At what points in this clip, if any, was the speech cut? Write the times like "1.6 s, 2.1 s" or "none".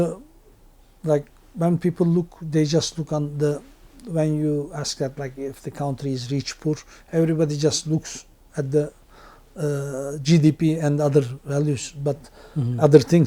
none